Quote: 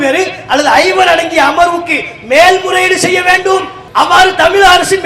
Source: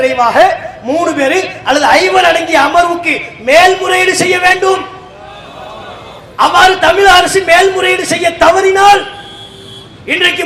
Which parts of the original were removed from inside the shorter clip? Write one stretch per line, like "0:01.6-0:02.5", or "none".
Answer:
0:04.9-0:06.2